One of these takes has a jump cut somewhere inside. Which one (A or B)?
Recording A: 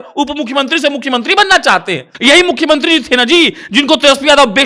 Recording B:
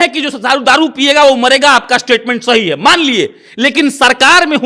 A